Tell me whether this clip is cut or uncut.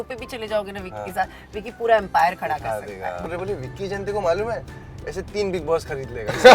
cut